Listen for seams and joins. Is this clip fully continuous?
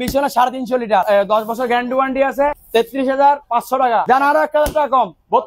no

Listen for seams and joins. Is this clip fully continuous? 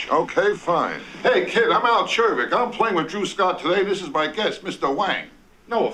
yes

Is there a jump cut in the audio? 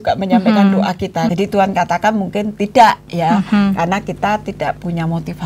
yes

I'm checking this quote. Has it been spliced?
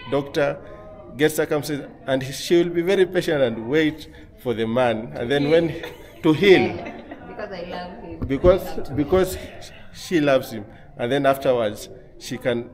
no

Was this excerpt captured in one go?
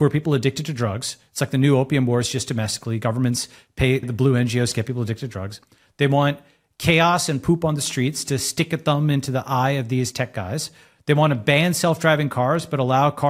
no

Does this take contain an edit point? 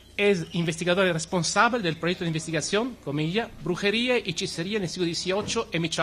yes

